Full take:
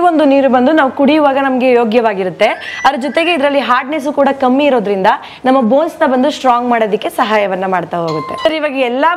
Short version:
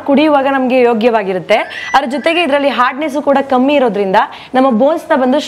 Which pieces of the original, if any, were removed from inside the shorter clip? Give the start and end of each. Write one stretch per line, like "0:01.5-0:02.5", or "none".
none